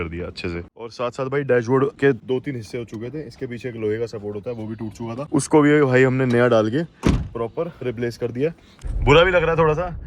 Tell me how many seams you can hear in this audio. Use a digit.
4